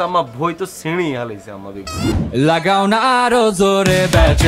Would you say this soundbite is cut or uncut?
cut